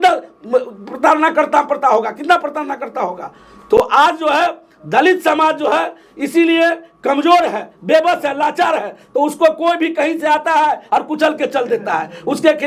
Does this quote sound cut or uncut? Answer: uncut